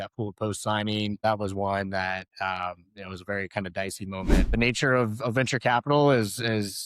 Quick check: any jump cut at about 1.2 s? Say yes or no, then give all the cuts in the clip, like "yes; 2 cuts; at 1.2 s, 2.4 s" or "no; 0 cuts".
yes; 2 cuts; at 1.2 s, 4.5 s